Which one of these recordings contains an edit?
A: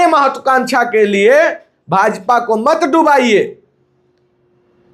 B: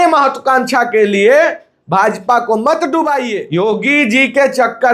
B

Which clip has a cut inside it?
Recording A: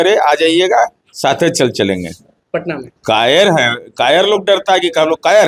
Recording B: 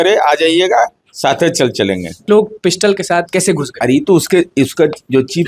B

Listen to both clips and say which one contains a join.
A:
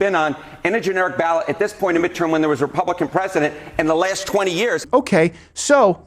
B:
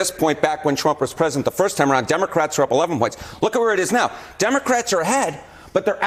A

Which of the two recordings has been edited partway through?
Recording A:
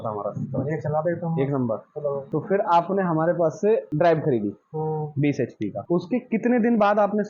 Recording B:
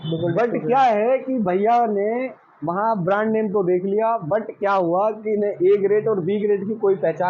A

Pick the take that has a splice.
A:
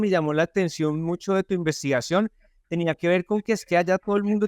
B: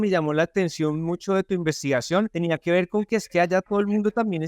B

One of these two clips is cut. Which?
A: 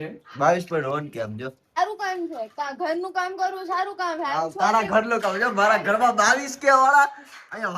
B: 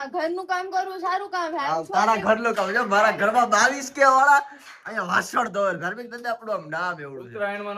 A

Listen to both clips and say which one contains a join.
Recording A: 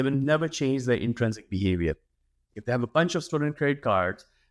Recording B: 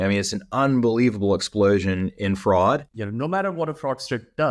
B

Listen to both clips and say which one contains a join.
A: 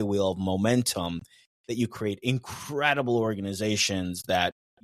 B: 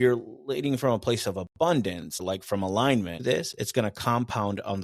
B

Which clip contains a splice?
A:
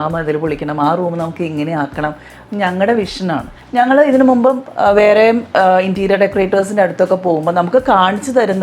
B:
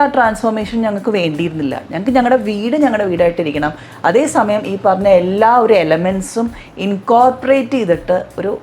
A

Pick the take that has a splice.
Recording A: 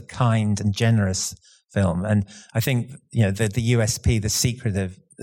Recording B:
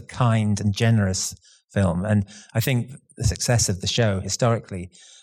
B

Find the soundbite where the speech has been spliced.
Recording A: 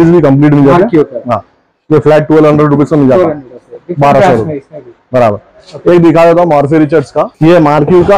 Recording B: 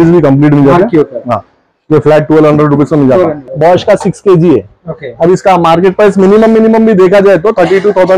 B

